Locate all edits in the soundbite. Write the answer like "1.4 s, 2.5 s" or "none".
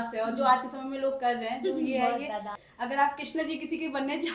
2.6 s